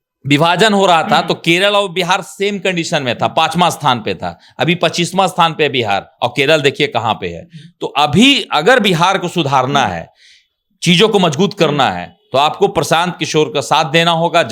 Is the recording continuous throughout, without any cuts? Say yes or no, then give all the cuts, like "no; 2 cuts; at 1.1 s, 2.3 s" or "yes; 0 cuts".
yes; 0 cuts